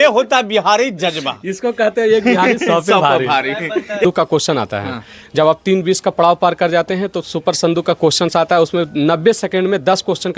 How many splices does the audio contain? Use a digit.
1